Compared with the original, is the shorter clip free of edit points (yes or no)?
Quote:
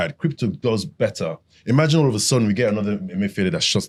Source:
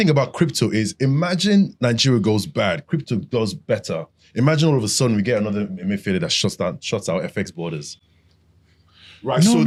yes